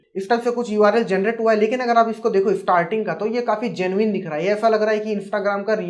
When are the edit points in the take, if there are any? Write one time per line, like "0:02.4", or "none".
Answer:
none

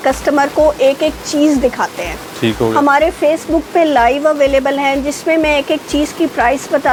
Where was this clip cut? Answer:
none

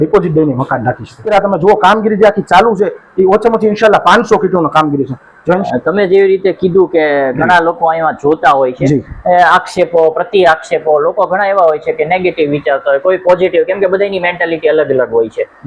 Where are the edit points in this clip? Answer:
0:01.3
0:05.6

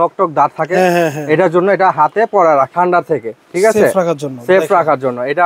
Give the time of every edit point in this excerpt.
0:02.7

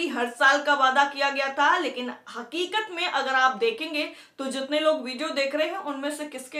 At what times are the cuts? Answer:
none

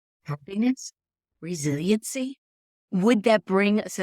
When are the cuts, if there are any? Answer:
0:02.7

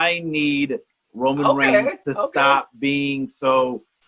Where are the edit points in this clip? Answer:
none

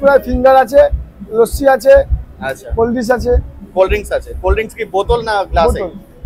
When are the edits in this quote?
none

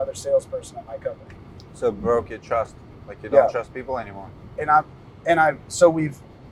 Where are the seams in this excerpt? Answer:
none

